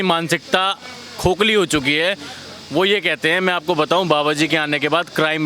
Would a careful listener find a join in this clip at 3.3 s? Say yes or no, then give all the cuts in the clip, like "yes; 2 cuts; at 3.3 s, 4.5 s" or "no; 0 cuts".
no; 0 cuts